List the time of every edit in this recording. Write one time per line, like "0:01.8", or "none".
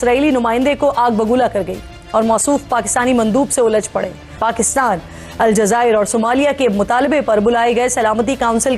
0:04.4